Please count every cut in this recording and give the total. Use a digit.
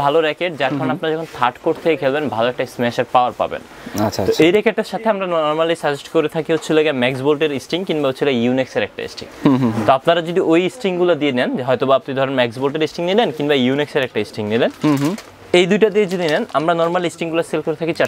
0